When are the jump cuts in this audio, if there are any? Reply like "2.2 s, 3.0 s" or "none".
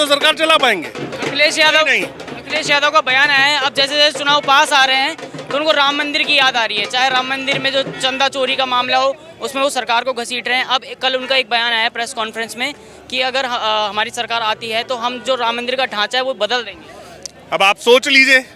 none